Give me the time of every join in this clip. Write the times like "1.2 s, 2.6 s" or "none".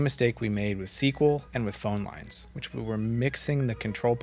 none